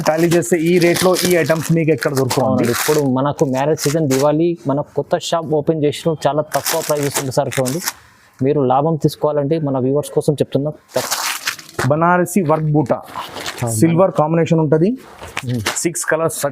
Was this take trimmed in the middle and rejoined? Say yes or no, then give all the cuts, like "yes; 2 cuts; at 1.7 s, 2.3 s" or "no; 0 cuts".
yes; 1 cut; at 11.0 s